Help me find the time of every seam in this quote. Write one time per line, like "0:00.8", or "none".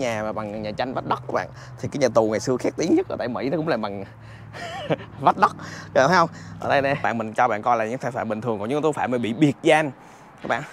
0:07.1